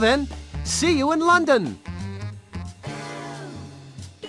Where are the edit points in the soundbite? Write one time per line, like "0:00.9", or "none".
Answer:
0:01.8